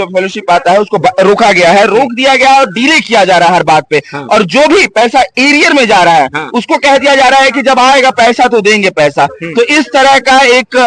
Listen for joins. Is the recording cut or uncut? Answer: uncut